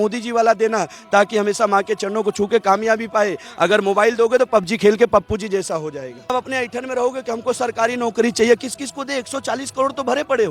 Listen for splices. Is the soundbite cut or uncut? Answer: cut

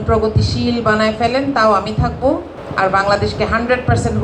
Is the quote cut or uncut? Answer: cut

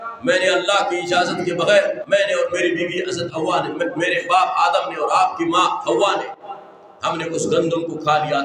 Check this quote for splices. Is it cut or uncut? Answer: uncut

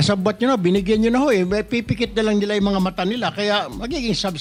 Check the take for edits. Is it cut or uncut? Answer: uncut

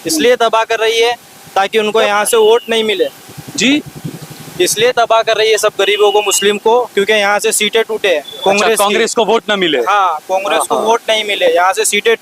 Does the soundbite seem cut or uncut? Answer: uncut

